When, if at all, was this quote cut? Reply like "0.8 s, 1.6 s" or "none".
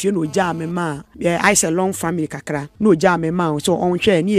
1.0 s, 2.7 s